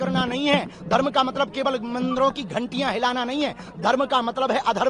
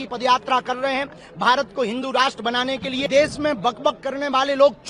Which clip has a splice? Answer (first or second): second